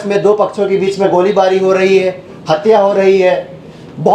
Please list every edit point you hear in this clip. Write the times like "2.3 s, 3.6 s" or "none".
none